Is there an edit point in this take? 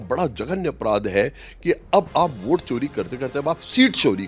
no; 0 cuts

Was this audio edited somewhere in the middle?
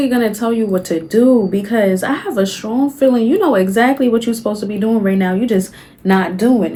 no; 0 cuts

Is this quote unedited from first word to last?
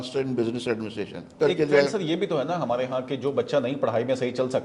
no; 1 cut; at 1.3 s

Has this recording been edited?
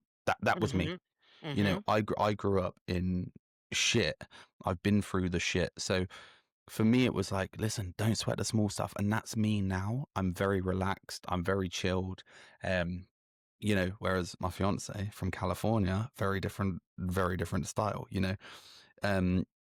no; 0 cuts

